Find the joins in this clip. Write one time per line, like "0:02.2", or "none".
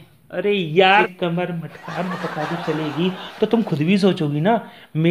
0:01.1

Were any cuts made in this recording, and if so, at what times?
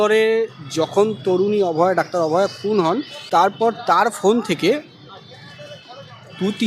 0:03.6

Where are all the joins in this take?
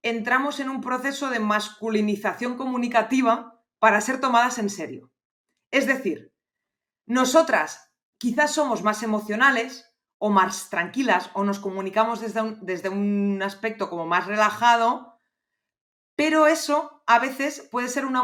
none

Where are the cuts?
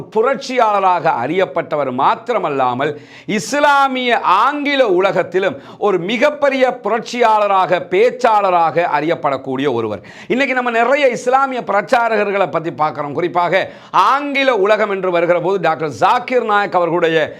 none

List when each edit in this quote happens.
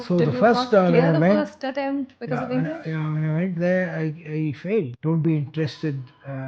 0:04.9

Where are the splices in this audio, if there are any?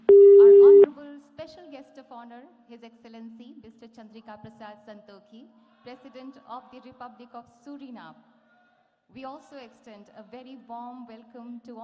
0:00.9

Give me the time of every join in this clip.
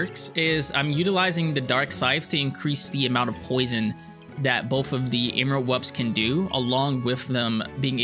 none

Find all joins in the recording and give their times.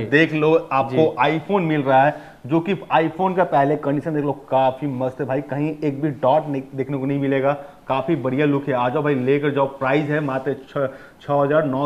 none

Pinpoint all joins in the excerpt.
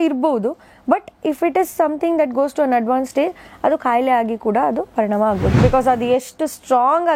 0:05.5

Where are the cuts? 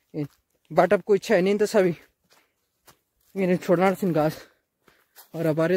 none

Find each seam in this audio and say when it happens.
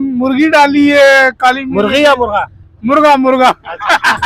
none

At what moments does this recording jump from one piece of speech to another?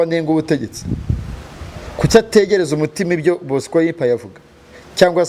none

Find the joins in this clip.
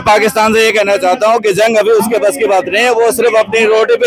none

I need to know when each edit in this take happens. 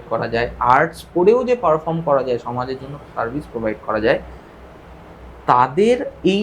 none

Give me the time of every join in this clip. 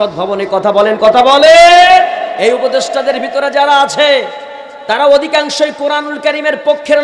0:02.3

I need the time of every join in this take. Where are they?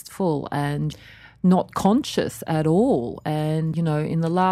0:00.9
0:03.7

